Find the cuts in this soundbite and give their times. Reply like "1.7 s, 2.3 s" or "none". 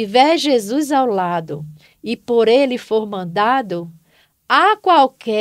none

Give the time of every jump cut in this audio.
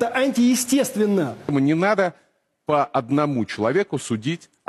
1.8 s

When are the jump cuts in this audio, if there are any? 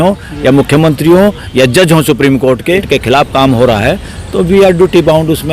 2.9 s

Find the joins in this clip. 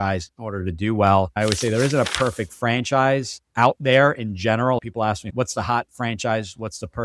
1.3 s

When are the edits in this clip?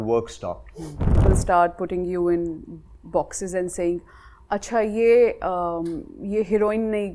1.2 s

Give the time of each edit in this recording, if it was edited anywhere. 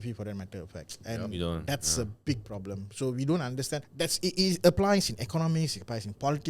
3.9 s

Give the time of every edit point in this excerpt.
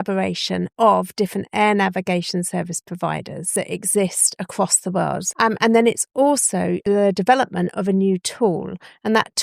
3.4 s, 5.3 s, 6.8 s

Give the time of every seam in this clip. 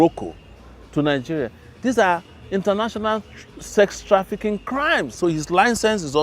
5.1 s

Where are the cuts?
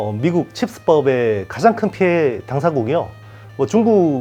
none

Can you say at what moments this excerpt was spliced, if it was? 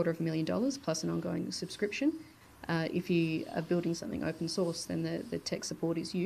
2.3 s

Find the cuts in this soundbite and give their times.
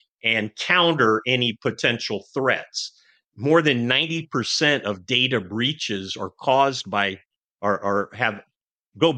none

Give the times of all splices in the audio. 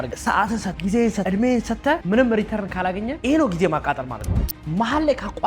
3.1 s, 4.3 s

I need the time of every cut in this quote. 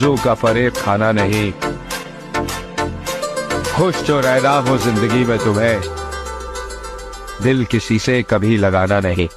none

